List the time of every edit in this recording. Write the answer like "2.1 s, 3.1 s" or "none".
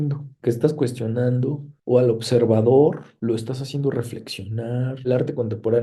3.1 s, 5.1 s